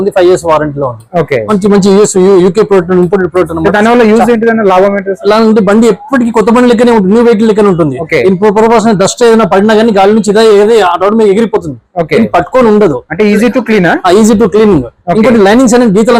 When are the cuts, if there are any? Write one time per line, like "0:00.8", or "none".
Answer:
none

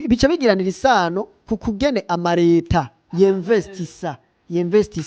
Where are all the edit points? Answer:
none

